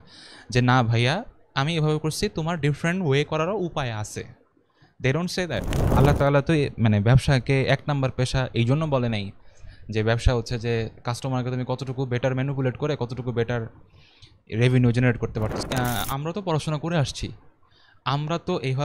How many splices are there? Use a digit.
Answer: 2